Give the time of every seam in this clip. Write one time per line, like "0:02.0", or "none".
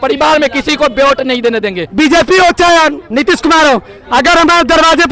0:01.8
0:03.1